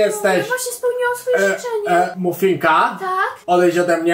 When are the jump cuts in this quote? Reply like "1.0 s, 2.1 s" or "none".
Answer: 2.1 s

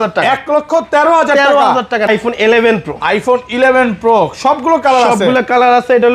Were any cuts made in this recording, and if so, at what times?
2.1 s

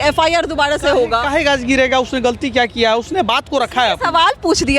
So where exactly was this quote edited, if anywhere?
none

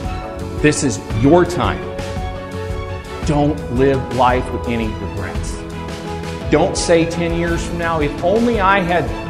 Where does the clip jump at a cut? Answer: none

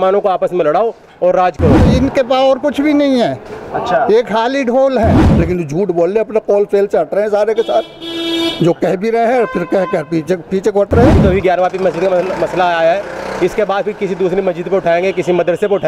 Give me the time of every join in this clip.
1.9 s, 5.3 s, 11.2 s

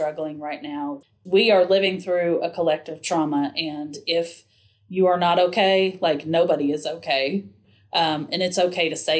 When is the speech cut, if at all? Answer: 1.1 s

